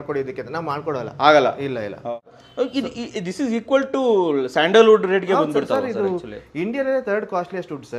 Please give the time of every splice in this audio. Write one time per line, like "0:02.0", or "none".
0:02.2